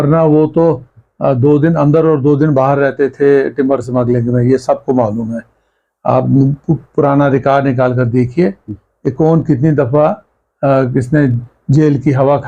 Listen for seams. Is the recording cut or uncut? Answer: uncut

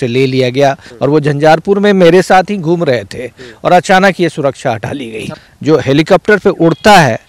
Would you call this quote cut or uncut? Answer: cut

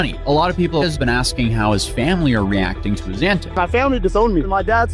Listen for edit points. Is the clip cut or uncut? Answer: cut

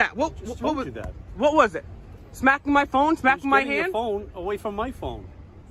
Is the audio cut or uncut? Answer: uncut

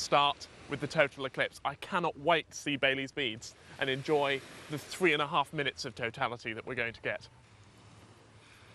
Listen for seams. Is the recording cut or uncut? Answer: cut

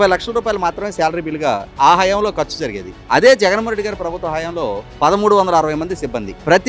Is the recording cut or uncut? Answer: uncut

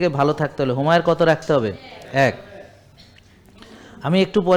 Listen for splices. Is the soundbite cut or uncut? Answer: uncut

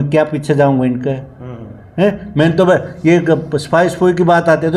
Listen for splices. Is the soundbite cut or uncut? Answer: uncut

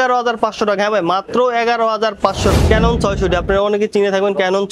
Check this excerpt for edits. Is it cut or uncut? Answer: cut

